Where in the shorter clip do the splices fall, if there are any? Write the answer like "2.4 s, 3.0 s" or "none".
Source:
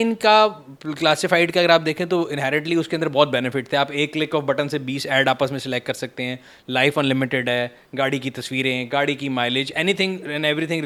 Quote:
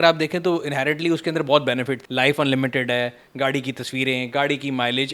2.0 s